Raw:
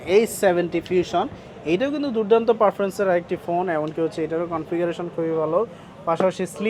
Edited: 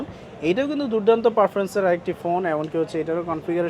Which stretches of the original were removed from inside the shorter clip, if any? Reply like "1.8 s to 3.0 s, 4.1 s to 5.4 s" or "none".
none

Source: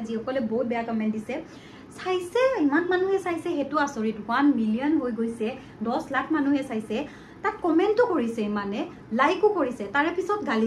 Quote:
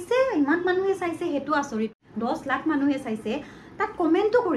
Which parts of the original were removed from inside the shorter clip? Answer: 4.2 s to 5.6 s

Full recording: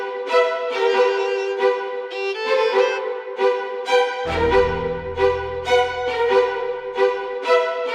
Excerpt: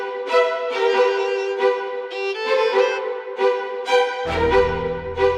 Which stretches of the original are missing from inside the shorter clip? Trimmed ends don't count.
none

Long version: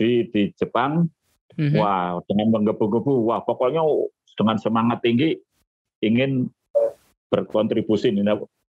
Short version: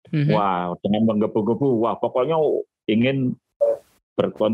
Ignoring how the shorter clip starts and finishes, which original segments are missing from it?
4.2 s to 5.9 s

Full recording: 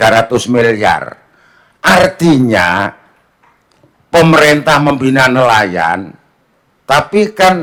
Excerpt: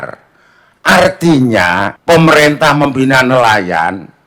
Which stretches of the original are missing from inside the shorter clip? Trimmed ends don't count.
2.9 s to 4.0 s

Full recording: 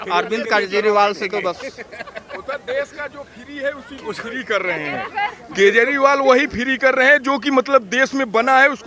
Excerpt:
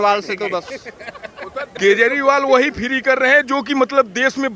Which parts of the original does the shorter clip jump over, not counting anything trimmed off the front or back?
2.6 s to 5.5 s

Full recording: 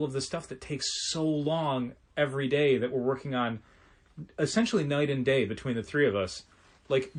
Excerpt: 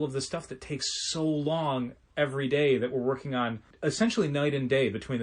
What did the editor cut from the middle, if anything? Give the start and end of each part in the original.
3.7 s to 4.2 s

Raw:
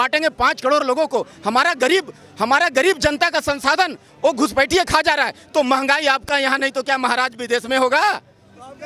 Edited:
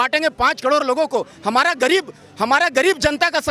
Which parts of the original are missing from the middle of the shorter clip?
none

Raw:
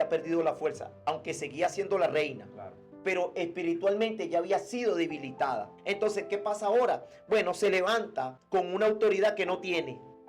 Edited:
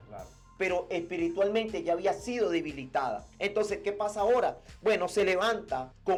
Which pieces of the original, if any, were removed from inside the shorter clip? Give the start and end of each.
none

